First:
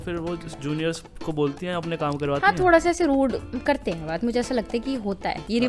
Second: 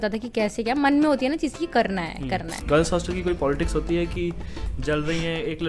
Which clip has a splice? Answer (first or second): second